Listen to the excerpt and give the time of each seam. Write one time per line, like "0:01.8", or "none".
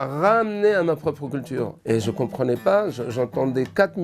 0:01.8